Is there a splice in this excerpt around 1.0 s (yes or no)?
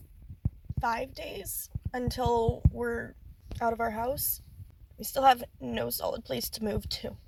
no